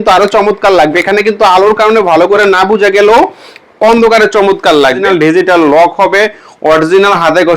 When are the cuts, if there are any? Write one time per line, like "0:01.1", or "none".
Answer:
0:05.0